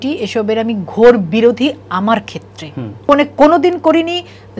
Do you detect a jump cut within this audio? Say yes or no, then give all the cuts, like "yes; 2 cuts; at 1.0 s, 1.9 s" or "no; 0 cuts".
yes; 1 cut; at 3.1 s